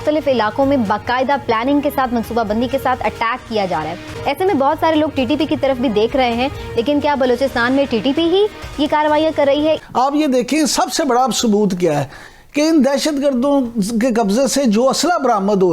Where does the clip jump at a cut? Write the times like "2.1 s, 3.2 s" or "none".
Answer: 4.1 s, 9.9 s